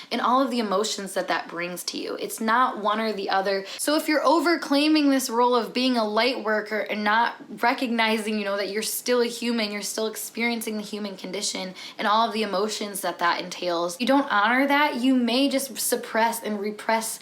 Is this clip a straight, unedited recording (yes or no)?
no